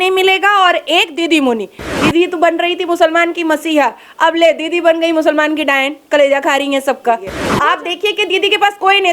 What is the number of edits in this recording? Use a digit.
2